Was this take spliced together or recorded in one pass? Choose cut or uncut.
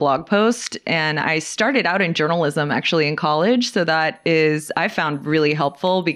uncut